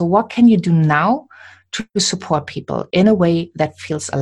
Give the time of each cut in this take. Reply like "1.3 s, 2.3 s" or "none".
none